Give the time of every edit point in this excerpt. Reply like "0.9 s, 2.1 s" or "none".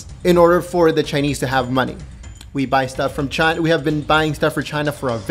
1.7 s